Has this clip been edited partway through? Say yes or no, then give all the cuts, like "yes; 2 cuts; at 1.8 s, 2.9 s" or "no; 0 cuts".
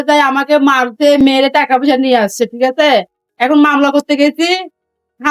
no; 0 cuts